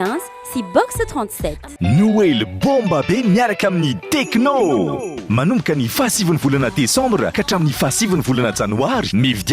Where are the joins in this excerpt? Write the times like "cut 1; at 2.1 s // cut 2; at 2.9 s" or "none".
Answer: cut 1; at 1.7 s